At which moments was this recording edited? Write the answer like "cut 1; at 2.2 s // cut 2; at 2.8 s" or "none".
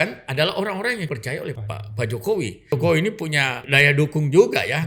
cut 1; at 1.1 s // cut 2; at 2.7 s // cut 3; at 3.6 s